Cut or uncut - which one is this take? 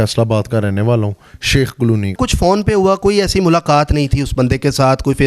cut